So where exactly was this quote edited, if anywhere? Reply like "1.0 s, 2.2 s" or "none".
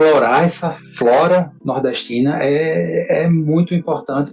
none